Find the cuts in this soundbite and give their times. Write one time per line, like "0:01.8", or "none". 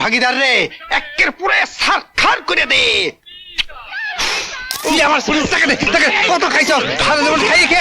0:04.8

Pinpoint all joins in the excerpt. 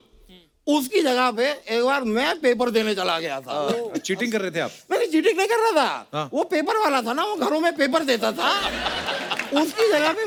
none

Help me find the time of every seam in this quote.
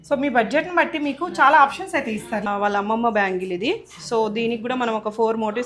0:02.4

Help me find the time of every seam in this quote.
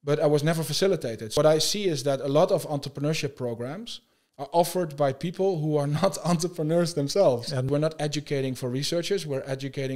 0:01.3
0:07.7

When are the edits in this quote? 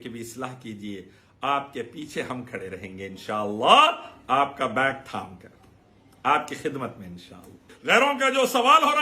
0:07.7

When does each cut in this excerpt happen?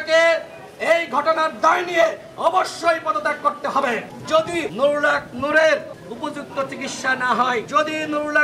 0:04.4
0:06.0
0:07.7

